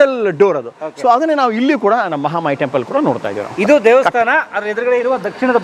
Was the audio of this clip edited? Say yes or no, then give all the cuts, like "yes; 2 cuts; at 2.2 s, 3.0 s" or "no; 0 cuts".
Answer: no; 0 cuts